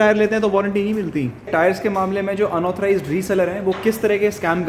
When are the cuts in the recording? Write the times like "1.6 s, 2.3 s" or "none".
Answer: 1.5 s